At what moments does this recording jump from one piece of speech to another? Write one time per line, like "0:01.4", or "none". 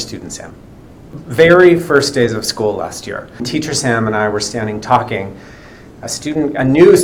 0:01.2
0:03.5